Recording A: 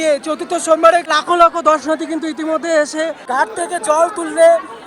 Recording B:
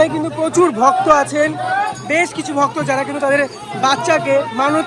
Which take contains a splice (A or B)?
A